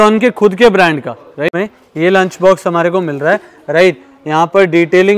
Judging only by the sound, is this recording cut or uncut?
cut